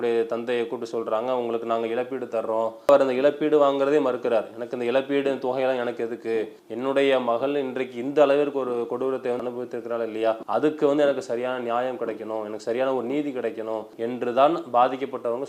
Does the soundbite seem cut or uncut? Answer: cut